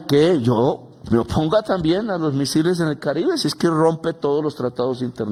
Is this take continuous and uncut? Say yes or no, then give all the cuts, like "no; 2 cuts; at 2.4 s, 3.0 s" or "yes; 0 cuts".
yes; 0 cuts